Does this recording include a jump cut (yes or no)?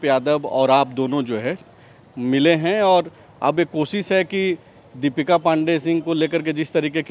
no